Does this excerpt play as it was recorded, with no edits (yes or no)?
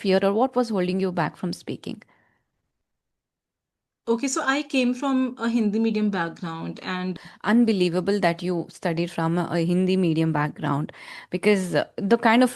no